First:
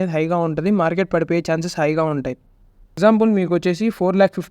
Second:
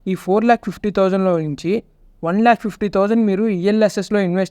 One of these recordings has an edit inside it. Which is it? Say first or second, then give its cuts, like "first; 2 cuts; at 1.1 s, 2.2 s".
first; 1 cut; at 3.0 s